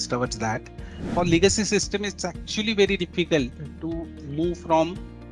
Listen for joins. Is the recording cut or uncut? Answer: cut